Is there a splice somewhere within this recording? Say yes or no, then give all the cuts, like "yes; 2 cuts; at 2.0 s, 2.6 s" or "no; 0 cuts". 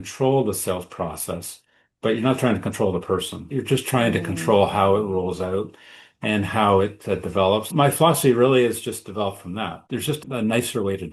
yes; 3 cuts; at 3.5 s, 7.7 s, 10.2 s